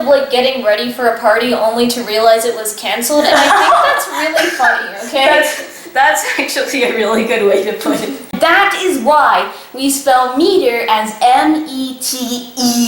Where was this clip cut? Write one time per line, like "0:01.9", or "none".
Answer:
0:08.3